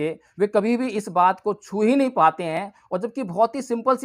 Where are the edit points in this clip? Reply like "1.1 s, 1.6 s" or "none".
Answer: none